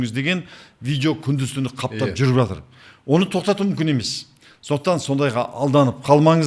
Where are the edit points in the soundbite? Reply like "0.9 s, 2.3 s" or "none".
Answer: none